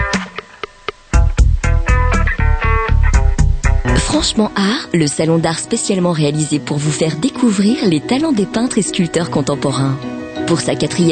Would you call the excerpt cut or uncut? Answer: cut